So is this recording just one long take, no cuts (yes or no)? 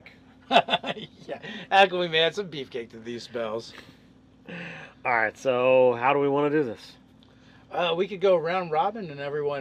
yes